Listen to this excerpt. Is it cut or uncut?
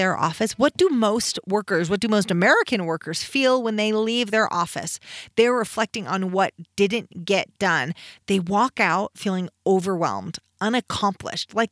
uncut